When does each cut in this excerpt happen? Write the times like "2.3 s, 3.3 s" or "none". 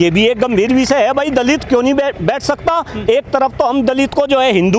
none